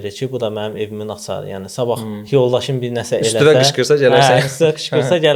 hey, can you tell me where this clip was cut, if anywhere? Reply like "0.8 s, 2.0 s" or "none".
none